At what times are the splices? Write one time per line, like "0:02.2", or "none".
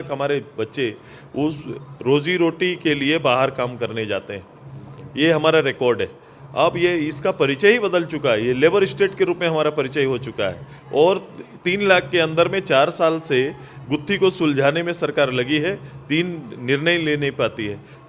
none